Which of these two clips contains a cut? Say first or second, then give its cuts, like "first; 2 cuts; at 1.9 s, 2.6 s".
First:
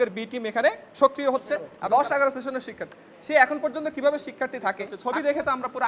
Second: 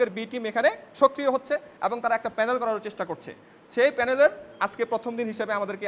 first; 2 cuts; at 1.7 s, 4.9 s